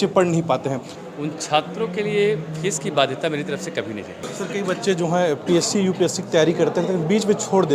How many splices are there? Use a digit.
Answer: 2